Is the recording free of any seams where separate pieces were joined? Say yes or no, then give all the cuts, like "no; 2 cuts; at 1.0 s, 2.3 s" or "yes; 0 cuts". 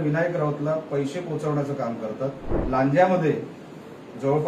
no; 1 cut; at 2.5 s